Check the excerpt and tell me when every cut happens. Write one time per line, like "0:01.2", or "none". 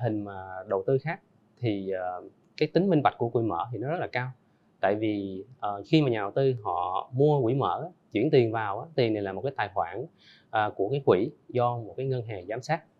none